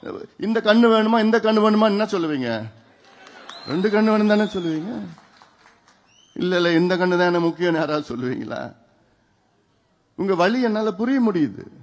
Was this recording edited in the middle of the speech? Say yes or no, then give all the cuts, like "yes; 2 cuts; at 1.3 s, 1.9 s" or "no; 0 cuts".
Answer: no; 0 cuts